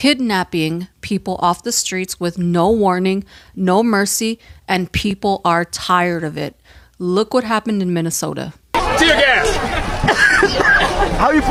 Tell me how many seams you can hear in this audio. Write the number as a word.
zero